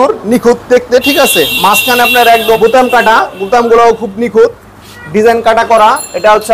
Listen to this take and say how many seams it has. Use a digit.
1